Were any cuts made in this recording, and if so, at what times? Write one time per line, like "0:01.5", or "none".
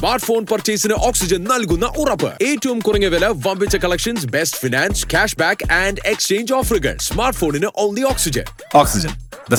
none